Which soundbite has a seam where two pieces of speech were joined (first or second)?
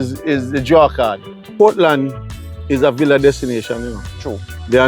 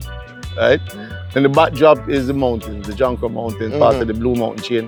first